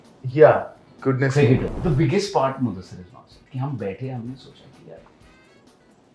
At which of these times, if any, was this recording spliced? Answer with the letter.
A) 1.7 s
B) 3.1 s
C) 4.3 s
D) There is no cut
A